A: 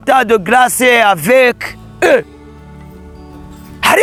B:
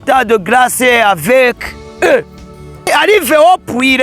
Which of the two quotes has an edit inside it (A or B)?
B